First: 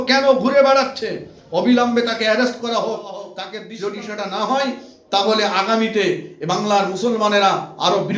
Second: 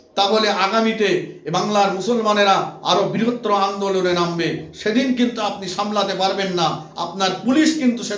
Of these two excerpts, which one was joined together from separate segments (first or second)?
first